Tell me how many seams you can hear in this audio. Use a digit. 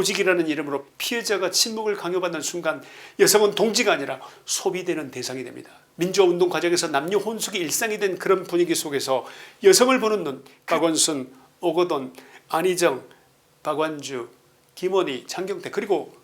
1